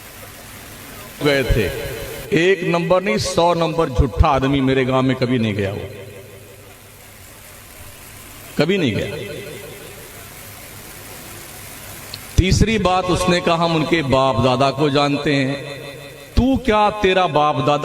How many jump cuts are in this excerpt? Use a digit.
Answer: 1